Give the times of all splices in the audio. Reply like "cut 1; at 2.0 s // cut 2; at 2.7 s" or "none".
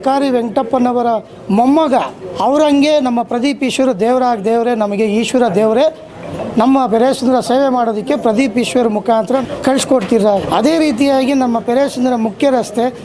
cut 1; at 2.2 s // cut 2; at 9.4 s // cut 3; at 10.4 s

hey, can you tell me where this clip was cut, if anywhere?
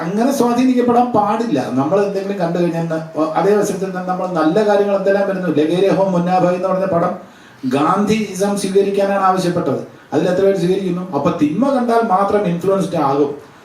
none

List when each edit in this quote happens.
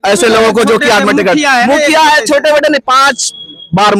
none

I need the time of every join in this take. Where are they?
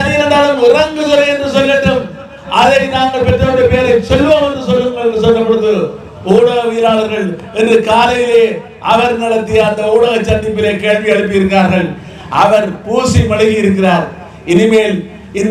none

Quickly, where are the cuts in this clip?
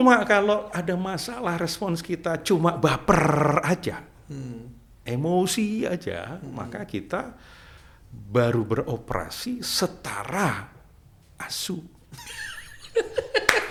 none

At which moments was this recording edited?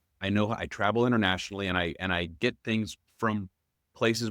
cut 1; at 3.0 s

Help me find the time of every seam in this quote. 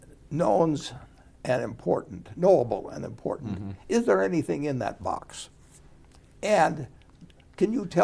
none

